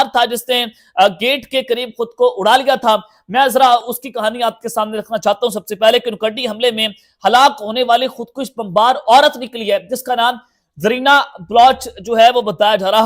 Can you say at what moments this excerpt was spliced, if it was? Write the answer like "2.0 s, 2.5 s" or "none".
none